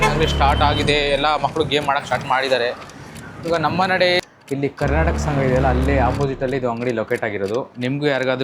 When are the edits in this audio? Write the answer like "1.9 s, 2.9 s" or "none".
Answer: 4.2 s